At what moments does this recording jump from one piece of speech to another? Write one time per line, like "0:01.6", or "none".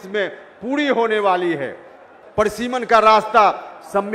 0:02.1